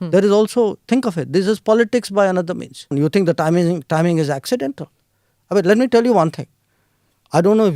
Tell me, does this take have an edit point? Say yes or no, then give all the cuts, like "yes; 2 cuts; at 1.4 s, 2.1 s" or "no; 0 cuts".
yes; 1 cut; at 2.9 s